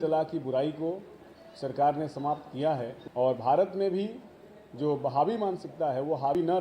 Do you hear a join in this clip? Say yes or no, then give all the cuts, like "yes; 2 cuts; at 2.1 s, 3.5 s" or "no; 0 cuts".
yes; 1 cut; at 3.0 s